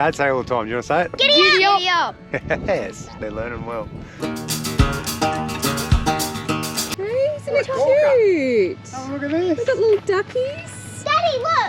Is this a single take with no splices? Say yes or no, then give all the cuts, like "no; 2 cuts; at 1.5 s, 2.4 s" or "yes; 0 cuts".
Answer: no; 2 cuts; at 4.1 s, 6.8 s